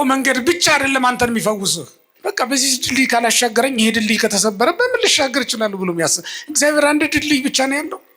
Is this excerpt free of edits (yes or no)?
no